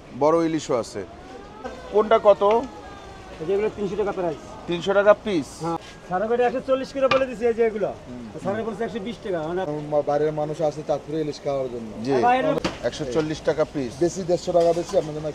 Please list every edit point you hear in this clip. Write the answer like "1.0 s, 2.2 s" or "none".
1.7 s, 5.8 s, 9.7 s, 12.6 s